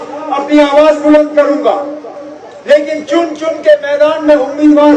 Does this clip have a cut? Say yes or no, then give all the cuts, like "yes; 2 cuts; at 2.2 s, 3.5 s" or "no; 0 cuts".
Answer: no; 0 cuts